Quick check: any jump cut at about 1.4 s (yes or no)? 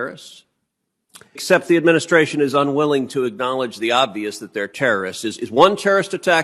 yes